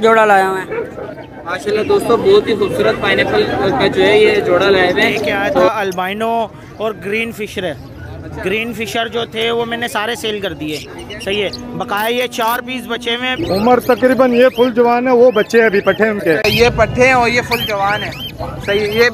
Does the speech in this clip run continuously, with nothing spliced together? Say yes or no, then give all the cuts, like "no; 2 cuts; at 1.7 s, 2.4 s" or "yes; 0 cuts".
no; 2 cuts; at 5.7 s, 13.3 s